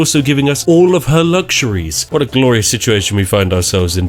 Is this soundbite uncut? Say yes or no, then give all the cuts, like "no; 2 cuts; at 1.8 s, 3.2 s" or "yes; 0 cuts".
no; 1 cut; at 2.0 s